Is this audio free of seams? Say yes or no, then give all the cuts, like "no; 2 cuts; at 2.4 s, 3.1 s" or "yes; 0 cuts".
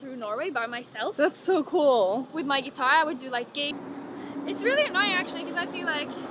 no; 1 cut; at 3.8 s